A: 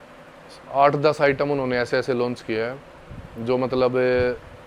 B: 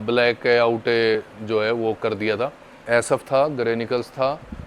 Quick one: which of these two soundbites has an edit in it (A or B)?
B